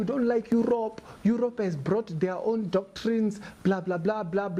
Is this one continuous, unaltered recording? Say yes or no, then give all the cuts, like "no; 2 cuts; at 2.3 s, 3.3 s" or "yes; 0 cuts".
yes; 0 cuts